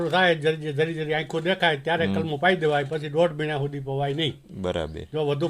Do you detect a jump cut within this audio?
no; 0 cuts

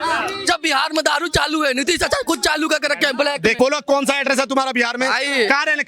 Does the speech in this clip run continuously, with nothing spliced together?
no; 1 cut; at 3.6 s

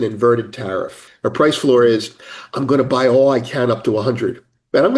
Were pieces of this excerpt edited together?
yes; 1 cut; at 1.0 s

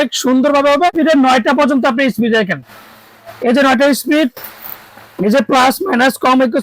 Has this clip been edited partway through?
yes; 1 cut; at 0.9 s

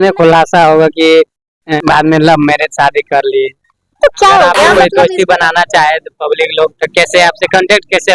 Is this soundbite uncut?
no; 2 cuts; at 1.6 s, 4.8 s

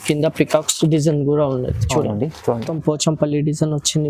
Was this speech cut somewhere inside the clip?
yes; 1 cut; at 2.7 s

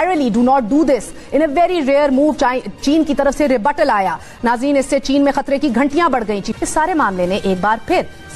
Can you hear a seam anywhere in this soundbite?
yes; 2 cuts; at 4.3 s, 6.5 s

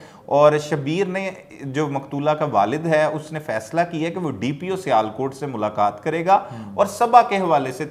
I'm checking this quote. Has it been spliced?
no; 0 cuts

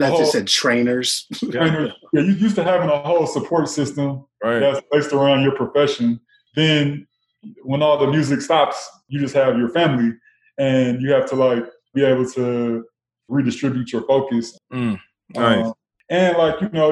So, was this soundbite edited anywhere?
yes; 6 cuts; at 6.4 s, 9.0 s, 11.9 s, 13.3 s, 14.6 s, 15.9 s

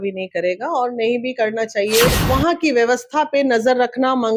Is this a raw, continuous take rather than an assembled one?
no; 1 cut; at 2.2 s

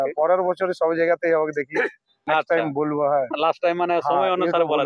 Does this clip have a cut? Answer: no; 0 cuts

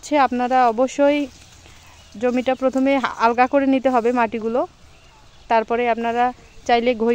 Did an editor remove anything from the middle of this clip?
no; 0 cuts

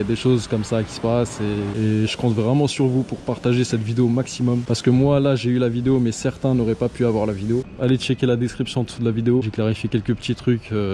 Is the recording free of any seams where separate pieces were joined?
no; 3 cuts; at 1.8 s, 4.6 s, 7.7 s

